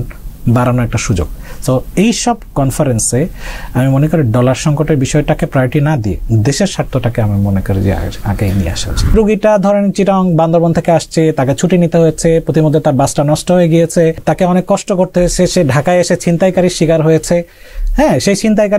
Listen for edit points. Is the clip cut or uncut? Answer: cut